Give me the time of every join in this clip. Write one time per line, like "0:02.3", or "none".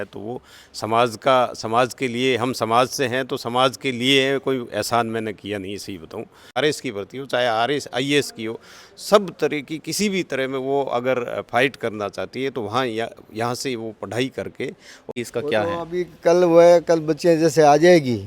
0:06.6
0:15.1